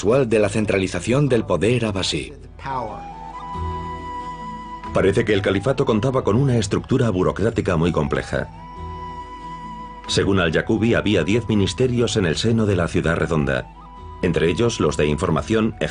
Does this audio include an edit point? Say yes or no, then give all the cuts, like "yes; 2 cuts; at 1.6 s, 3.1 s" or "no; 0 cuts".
yes; 1 cut; at 2.6 s